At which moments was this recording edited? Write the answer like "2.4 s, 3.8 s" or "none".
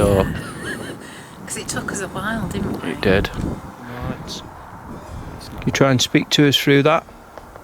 5.1 s